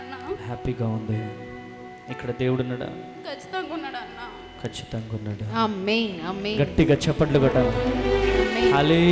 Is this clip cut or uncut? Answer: uncut